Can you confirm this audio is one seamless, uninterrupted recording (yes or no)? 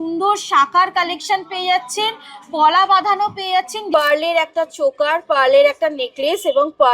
no